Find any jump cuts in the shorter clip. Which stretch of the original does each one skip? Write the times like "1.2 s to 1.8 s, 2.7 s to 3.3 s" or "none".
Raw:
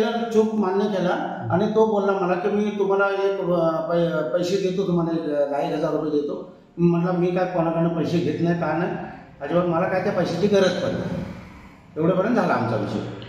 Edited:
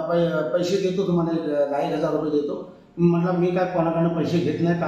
none